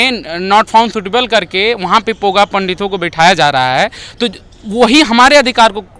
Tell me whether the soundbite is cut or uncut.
uncut